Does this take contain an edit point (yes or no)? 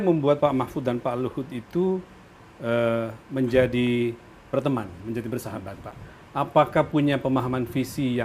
no